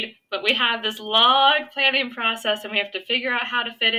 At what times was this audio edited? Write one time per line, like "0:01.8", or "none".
none